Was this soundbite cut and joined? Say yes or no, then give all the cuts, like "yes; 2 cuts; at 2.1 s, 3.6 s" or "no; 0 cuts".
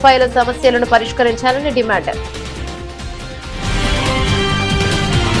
no; 0 cuts